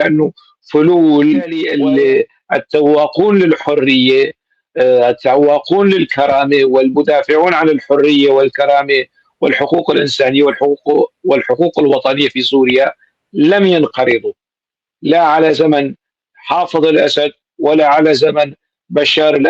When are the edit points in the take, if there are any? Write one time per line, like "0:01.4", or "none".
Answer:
0:01.7